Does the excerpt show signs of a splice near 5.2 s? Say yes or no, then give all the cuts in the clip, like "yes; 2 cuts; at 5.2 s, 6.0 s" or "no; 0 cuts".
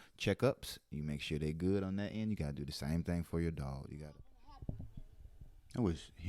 no; 1 cut; at 3.9 s